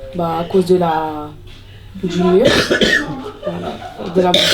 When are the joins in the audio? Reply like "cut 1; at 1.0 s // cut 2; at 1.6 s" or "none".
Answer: none